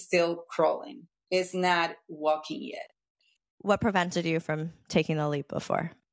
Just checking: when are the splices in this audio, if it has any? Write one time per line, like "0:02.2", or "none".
0:03.4

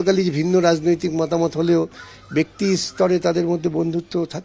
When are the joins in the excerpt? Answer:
none

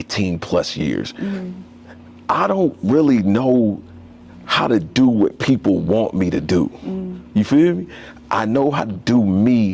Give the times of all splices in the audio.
none

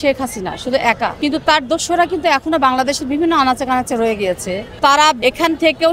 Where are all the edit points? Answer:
0:01.1
0:04.6
0:05.2

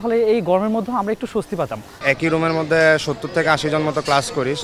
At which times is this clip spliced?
0:02.0

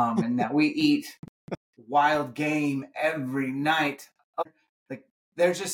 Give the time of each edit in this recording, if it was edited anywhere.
0:04.4

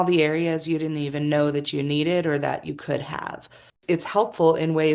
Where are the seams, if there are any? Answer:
0:03.7

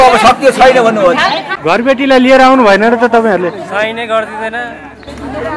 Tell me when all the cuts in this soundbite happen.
0:01.5

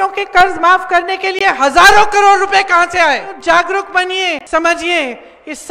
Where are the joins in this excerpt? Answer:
0:03.4
0:04.4

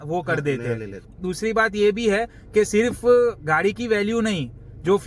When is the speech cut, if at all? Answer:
none

